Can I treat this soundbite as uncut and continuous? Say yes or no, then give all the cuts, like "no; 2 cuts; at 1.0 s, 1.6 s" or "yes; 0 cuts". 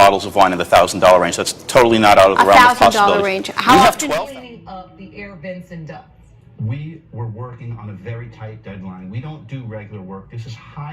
no; 1 cut; at 4.0 s